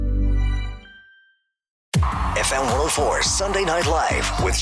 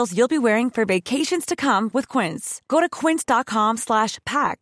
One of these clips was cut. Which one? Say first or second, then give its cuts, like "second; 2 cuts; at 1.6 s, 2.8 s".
first; 1 cut; at 1.9 s